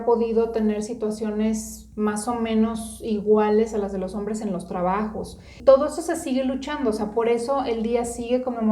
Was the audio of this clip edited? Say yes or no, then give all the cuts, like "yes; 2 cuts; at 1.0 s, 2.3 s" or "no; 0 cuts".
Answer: yes; 1 cut; at 5.6 s